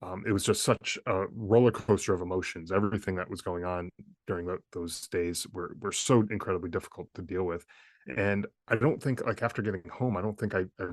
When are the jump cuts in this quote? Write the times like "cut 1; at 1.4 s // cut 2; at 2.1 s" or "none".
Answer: cut 1; at 8.6 s